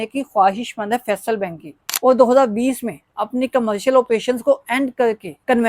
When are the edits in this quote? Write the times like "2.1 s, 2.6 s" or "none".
1.9 s